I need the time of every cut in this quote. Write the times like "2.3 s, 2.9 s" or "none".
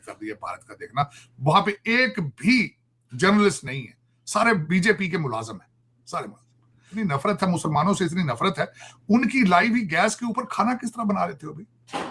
6.9 s